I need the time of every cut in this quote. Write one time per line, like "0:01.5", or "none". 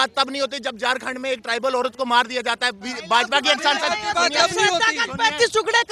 none